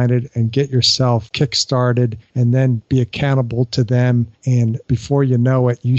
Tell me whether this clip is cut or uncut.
cut